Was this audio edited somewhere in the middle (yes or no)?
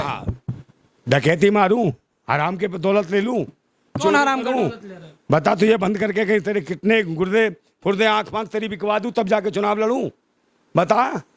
no